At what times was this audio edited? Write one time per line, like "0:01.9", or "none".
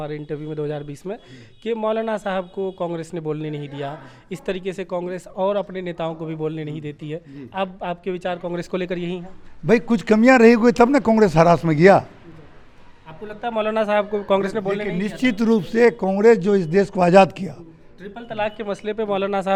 none